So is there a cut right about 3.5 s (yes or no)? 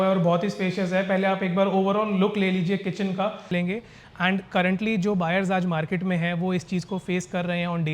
yes